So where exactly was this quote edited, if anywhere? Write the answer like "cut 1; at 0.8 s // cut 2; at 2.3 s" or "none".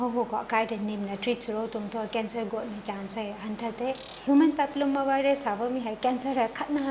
cut 1; at 4.1 s

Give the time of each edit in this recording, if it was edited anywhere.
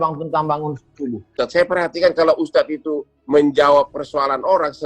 cut 1; at 1.3 s

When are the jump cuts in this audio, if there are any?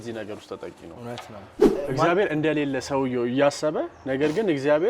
cut 1; at 1.6 s

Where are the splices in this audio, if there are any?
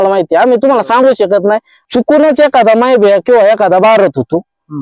cut 1; at 1.7 s

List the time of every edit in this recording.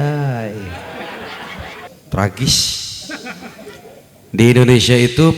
cut 1; at 1.9 s

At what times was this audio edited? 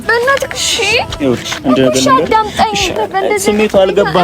cut 1; at 3.0 s

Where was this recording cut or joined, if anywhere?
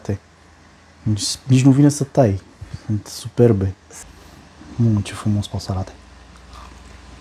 cut 1; at 3.8 s

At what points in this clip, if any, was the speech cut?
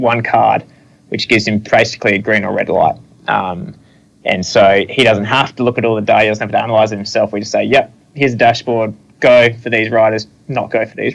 none

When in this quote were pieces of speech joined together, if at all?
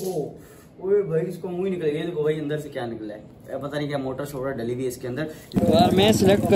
cut 1; at 5.5 s

